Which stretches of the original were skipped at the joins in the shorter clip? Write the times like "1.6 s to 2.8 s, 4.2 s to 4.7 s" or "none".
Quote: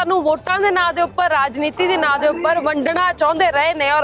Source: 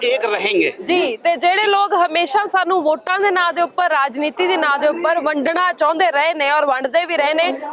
none